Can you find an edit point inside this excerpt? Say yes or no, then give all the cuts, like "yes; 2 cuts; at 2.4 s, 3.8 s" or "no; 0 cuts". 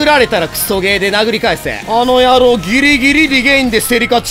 yes; 1 cut; at 1.8 s